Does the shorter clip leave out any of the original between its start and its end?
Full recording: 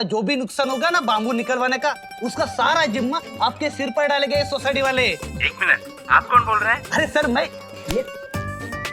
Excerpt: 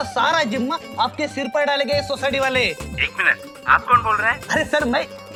no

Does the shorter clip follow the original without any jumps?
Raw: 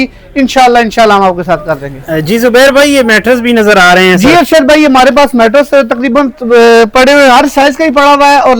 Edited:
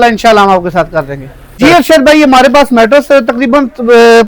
no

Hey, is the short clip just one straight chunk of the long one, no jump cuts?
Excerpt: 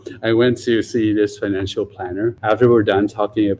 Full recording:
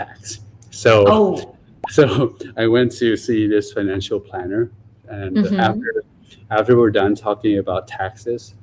no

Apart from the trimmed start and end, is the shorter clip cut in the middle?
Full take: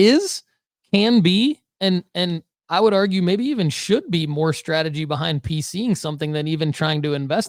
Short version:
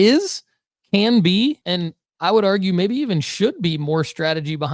yes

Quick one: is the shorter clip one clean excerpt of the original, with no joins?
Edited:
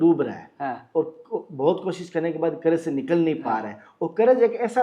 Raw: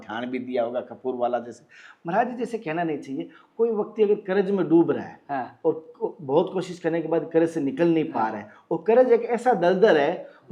yes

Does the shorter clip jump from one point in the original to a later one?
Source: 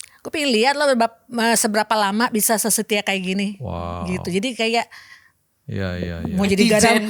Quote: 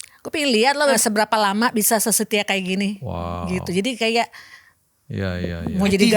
yes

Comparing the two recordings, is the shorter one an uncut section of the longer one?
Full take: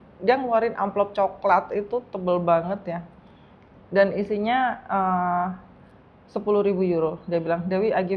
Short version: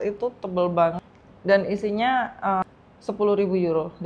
no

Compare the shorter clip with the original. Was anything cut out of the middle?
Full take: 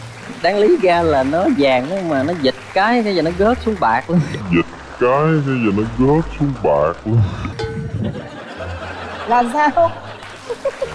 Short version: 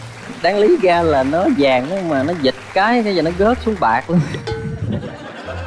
yes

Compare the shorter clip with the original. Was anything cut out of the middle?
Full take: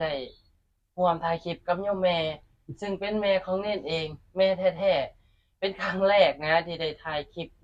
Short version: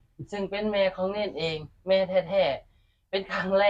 no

